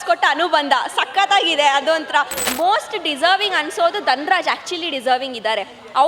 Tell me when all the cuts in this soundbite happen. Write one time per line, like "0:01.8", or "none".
0:02.5